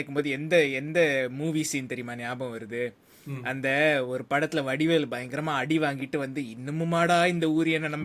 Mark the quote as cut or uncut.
uncut